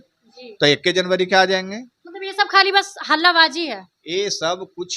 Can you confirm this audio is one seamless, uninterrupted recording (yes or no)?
yes